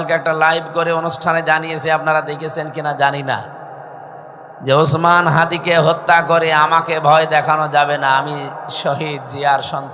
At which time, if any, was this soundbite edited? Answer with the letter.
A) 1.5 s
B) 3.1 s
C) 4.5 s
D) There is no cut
D